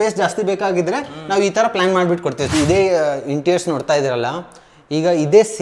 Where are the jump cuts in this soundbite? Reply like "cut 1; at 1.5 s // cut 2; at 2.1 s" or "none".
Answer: cut 1; at 2.4 s

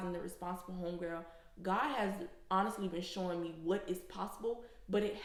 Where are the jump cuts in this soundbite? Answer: none

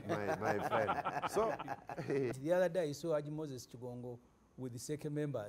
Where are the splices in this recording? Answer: cut 1; at 2.3 s

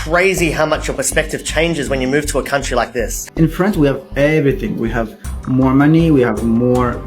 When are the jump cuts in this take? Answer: cut 1; at 3.2 s

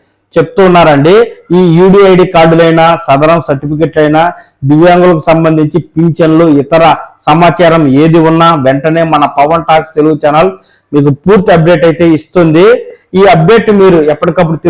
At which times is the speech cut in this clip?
none

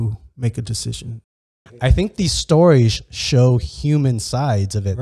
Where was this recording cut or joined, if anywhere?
cut 1; at 1.8 s

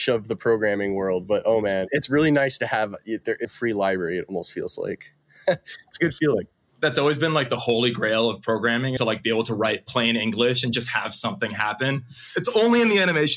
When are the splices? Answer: cut 1; at 1.9 s // cut 2; at 3.5 s // cut 3; at 9.1 s // cut 4; at 12.4 s

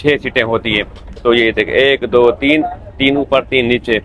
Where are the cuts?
none

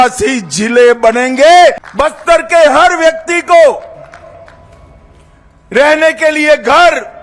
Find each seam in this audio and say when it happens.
cut 1; at 1.9 s

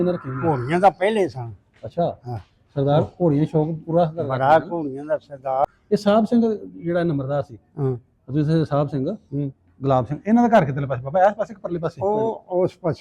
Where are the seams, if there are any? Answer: cut 1; at 5.6 s

